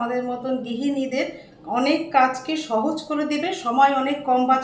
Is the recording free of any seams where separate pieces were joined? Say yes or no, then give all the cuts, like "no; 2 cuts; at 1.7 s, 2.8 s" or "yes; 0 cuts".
yes; 0 cuts